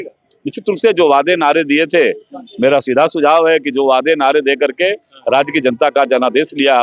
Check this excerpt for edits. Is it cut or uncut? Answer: uncut